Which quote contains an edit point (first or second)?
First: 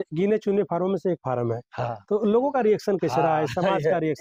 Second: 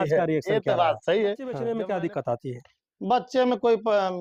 second